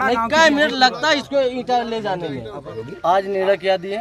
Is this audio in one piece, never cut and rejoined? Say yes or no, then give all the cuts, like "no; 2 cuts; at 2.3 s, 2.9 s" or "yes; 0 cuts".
no; 1 cut; at 2.8 s